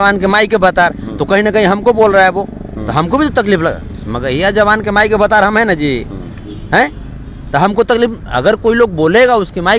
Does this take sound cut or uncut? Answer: uncut